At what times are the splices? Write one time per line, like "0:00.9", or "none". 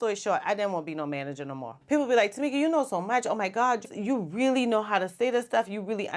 0:01.7